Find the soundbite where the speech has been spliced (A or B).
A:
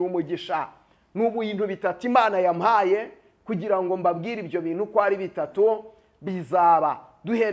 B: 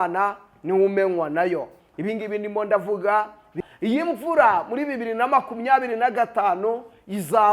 B